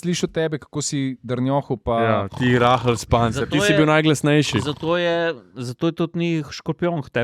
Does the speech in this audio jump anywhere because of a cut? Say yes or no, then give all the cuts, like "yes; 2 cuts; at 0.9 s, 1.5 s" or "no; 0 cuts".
no; 0 cuts